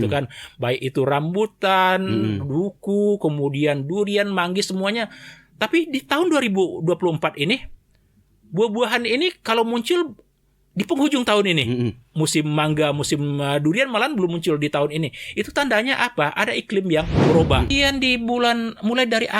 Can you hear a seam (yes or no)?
yes